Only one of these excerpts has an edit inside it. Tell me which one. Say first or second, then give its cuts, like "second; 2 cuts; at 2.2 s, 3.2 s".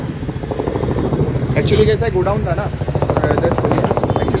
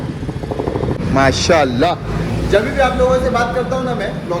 second; 1 cut; at 1.0 s